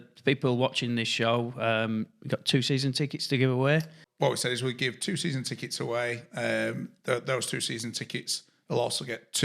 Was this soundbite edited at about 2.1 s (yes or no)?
no